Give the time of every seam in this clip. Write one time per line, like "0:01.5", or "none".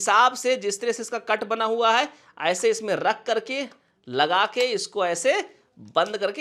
none